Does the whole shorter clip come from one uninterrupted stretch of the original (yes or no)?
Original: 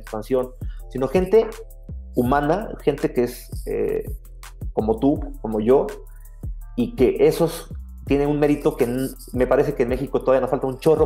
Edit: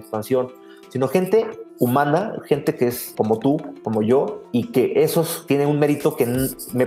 no